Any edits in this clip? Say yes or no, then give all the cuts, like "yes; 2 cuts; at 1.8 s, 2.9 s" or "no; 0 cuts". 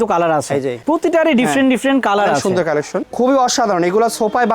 yes; 2 cuts; at 0.8 s, 3.1 s